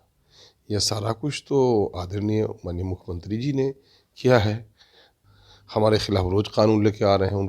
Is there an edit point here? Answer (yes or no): yes